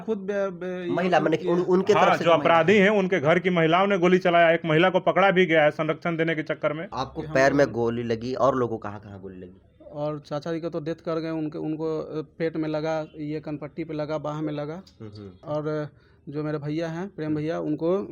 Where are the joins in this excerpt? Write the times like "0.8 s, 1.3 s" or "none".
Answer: 6.9 s, 15.4 s